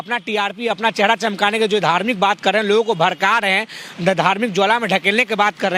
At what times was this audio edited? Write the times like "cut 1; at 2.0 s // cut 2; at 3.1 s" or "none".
none